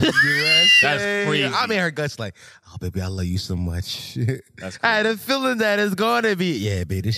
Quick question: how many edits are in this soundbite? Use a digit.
1